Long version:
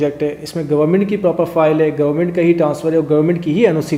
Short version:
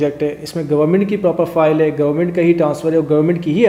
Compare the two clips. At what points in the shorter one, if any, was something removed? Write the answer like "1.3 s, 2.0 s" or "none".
none